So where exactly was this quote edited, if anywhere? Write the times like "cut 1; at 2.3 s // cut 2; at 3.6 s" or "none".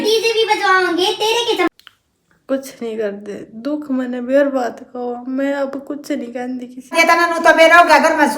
cut 1; at 1.7 s // cut 2; at 6.9 s